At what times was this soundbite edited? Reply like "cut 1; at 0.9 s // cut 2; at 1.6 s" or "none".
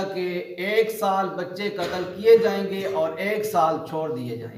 none